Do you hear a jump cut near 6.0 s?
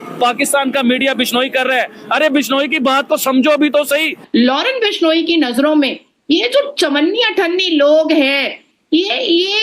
no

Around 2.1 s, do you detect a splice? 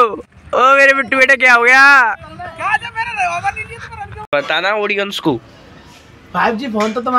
no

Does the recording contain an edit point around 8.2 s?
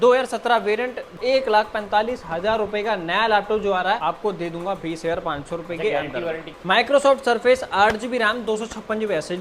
no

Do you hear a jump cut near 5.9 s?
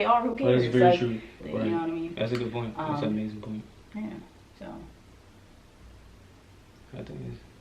no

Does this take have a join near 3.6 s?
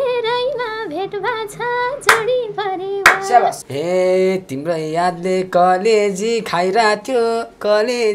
yes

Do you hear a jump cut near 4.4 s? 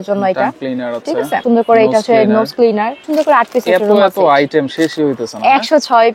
no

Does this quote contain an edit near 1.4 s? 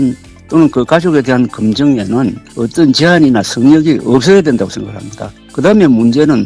no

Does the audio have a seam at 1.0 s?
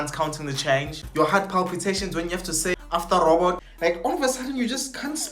yes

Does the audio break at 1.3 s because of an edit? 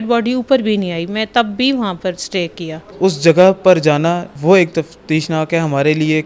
no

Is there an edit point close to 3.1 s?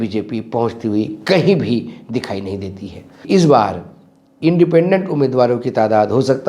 yes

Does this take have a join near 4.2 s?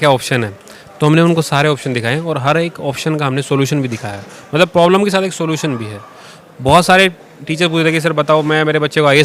no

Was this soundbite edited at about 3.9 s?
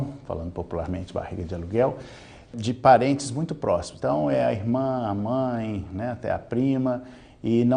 yes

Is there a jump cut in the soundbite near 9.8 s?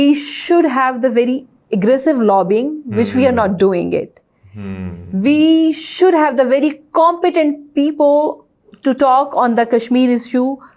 no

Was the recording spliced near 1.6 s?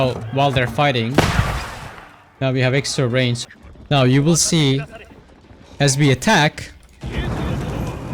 no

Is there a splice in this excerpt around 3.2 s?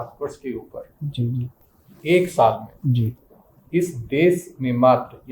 no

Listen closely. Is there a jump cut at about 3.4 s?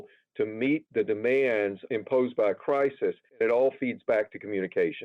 yes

